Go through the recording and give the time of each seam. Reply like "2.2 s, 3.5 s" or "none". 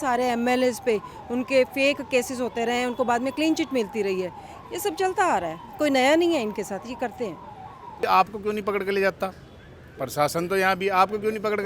8.0 s